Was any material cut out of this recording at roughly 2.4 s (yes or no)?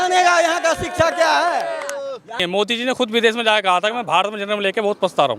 yes